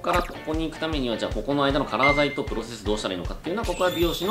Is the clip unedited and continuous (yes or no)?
yes